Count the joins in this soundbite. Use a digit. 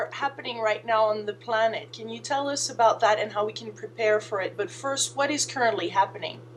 0